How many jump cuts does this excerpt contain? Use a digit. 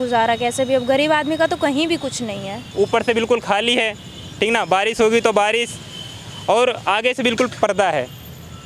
1